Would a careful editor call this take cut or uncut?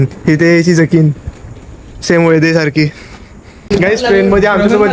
cut